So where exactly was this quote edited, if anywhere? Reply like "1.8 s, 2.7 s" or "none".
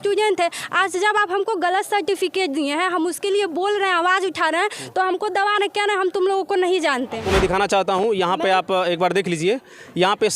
7.2 s